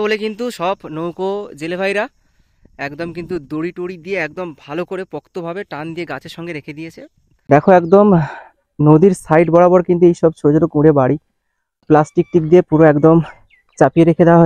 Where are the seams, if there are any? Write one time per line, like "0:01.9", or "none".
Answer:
0:07.5
0:11.9